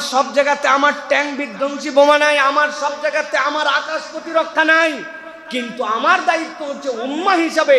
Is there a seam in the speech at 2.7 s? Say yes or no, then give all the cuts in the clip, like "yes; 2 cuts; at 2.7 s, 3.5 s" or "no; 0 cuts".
no; 0 cuts